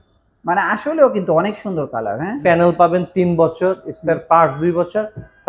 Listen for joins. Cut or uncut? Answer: cut